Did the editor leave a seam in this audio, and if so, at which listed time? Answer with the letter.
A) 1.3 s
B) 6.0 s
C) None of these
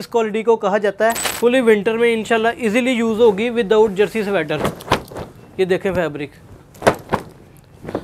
A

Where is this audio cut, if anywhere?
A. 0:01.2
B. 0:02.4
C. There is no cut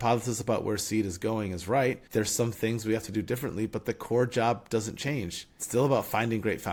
C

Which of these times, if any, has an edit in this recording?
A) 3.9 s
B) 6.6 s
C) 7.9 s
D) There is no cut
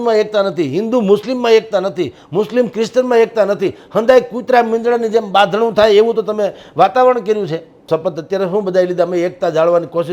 C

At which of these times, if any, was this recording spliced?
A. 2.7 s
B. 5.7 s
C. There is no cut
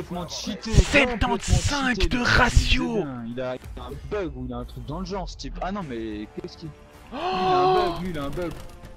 C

